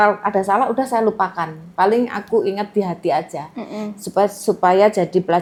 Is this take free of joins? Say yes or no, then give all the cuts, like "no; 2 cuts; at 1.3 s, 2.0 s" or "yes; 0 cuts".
yes; 0 cuts